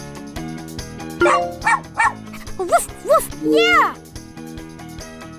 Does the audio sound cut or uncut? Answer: uncut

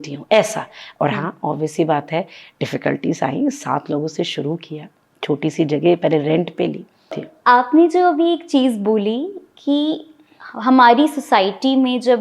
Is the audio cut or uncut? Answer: cut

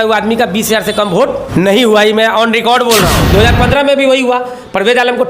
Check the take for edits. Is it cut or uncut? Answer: cut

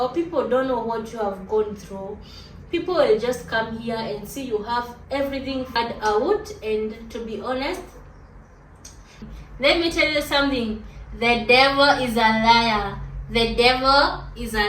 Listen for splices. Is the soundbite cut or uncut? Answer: cut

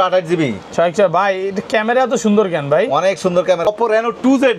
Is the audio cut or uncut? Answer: cut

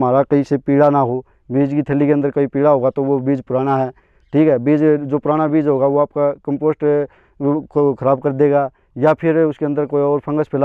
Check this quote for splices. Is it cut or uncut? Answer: uncut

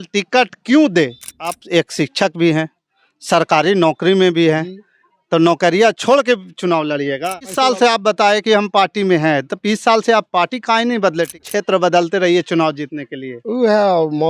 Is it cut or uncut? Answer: cut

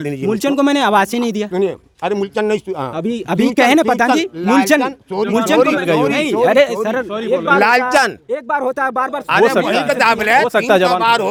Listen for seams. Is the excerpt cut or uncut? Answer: uncut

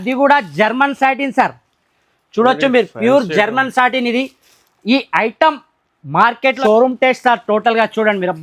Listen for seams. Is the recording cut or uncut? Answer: cut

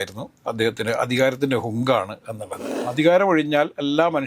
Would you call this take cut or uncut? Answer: cut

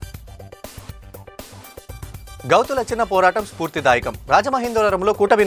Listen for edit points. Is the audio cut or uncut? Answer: cut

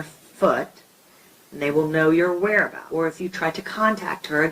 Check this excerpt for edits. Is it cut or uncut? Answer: cut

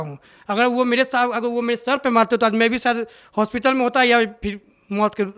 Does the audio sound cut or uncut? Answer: uncut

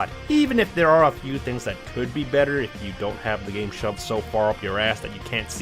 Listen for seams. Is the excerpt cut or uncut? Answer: cut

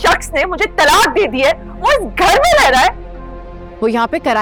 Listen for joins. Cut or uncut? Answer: uncut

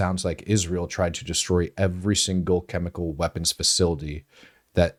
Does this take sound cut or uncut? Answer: uncut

